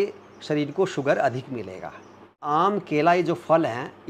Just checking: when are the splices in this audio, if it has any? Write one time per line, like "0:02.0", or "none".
0:02.3